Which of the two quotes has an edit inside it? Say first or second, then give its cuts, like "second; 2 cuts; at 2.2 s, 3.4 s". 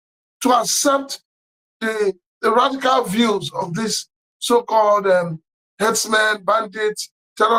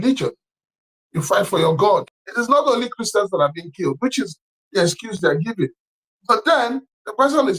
second; 1 cut; at 2.2 s